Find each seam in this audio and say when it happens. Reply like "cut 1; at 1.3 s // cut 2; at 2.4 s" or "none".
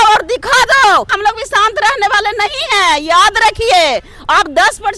cut 1; at 1.1 s